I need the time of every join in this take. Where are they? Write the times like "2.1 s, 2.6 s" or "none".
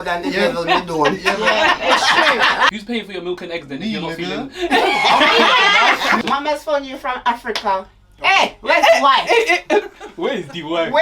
2.7 s, 6.2 s